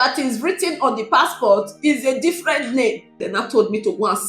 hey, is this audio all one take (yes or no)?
no